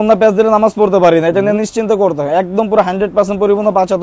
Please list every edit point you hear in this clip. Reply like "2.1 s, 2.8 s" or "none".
none